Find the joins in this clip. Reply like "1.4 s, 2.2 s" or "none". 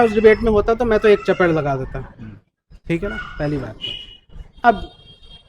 none